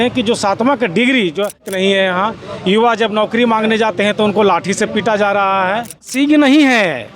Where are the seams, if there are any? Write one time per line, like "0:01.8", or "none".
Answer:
0:01.6
0:06.1